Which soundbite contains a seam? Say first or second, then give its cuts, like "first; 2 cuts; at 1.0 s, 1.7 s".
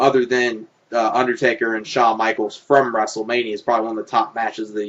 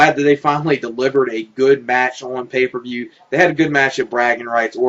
second; 1 cut; at 2.9 s